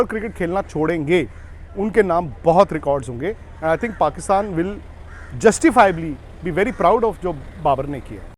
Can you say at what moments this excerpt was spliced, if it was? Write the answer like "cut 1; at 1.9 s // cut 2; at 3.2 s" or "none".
none